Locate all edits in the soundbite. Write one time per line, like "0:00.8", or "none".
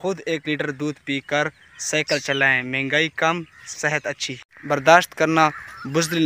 0:04.5